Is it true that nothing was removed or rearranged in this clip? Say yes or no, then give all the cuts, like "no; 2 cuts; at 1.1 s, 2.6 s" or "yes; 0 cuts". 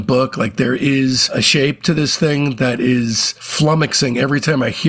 yes; 0 cuts